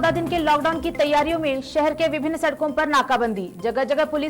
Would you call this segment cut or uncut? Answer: uncut